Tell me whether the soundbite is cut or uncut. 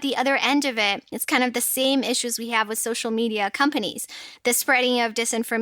cut